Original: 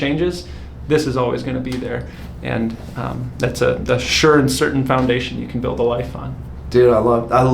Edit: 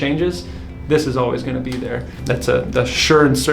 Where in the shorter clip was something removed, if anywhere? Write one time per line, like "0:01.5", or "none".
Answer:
0:02.1